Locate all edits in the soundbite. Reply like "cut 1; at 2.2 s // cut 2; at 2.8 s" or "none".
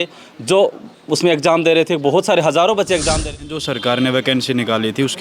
cut 1; at 3.4 s